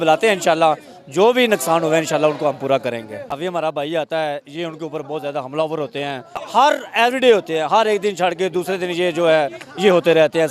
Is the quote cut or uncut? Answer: cut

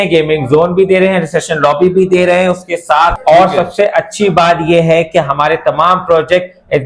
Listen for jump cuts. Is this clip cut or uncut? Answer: cut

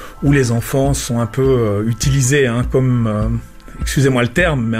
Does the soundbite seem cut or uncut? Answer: cut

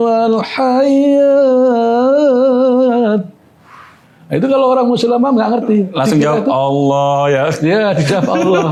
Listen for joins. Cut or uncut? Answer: uncut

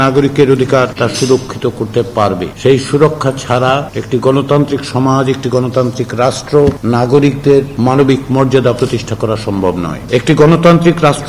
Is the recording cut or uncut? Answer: cut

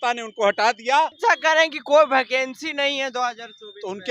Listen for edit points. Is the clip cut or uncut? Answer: cut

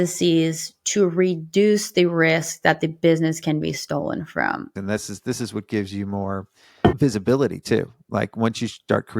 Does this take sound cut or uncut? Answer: cut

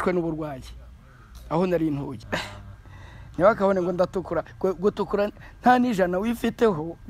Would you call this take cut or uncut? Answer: cut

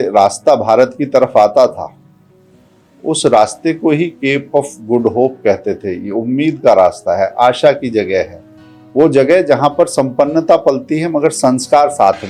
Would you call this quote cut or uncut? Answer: uncut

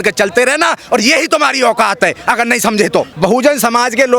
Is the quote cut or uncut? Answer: cut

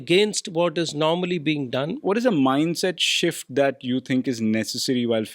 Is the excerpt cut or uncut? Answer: cut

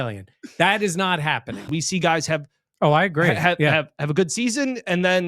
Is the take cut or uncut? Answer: cut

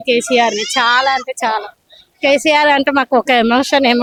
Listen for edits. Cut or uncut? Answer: uncut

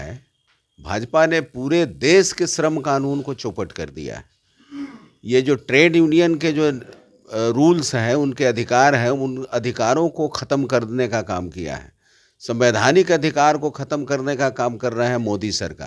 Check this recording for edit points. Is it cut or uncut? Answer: uncut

